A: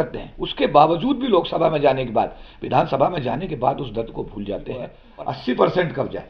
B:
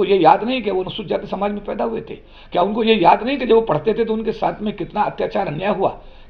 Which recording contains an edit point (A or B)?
A